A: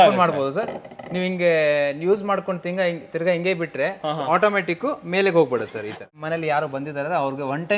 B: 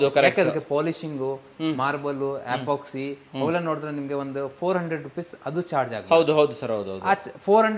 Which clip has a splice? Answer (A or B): A